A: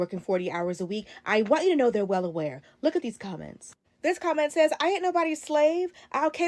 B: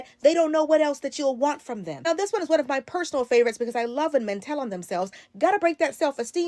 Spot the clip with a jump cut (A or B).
A